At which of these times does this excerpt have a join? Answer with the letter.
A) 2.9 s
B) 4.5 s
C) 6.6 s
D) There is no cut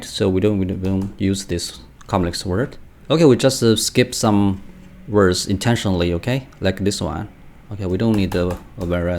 A